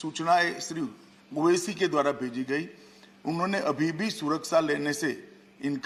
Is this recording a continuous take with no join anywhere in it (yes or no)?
yes